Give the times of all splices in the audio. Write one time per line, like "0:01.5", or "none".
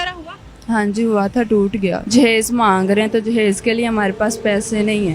0:02.0